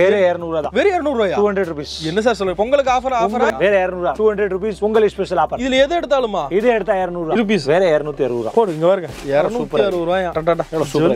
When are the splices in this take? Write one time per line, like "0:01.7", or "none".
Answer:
0:03.5
0:07.4